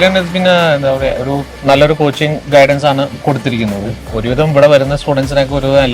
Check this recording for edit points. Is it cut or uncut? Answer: cut